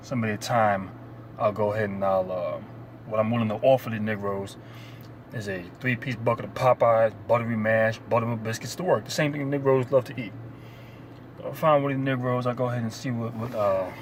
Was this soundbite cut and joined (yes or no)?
no